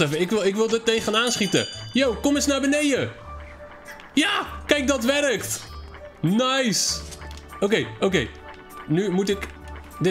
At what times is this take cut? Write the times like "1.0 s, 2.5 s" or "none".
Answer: none